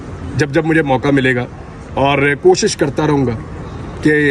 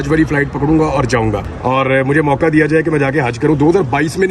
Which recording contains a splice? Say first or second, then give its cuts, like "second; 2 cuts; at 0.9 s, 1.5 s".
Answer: second; 1 cut; at 1.5 s